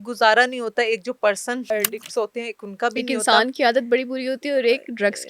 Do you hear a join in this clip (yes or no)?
yes